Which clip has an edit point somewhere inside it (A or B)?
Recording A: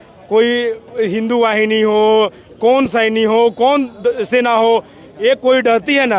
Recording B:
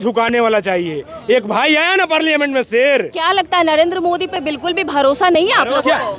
B